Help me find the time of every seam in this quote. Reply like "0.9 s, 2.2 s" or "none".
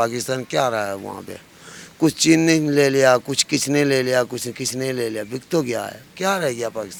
none